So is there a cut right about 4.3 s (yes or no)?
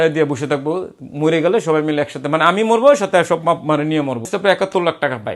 yes